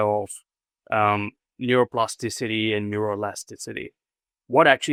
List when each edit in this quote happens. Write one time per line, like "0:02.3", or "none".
none